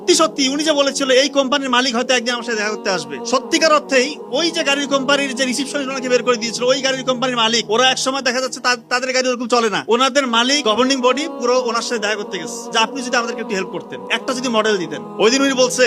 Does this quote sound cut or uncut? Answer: uncut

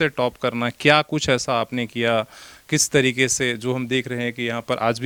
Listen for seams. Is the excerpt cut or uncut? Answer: uncut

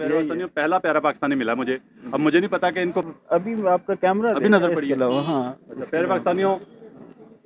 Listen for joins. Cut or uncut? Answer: cut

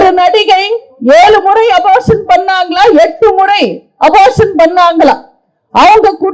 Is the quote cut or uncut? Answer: uncut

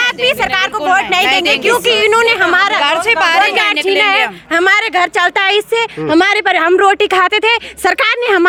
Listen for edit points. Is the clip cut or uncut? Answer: uncut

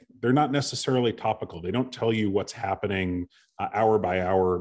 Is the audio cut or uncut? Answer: uncut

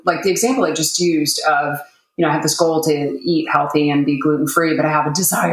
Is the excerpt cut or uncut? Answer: uncut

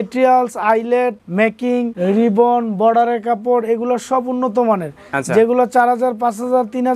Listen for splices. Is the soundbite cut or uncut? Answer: cut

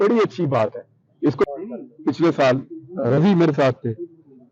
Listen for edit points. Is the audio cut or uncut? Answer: cut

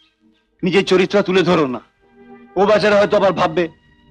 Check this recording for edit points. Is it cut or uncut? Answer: uncut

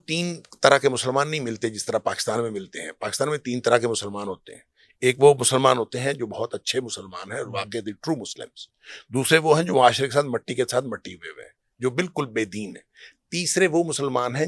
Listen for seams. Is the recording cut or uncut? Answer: uncut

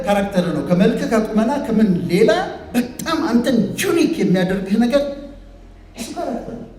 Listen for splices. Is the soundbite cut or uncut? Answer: uncut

